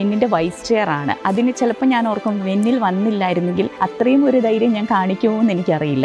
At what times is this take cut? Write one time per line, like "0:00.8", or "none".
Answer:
0:03.7